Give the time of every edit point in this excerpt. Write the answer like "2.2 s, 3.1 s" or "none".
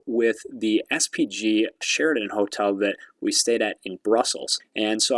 1.8 s